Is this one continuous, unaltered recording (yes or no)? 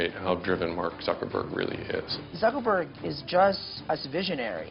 no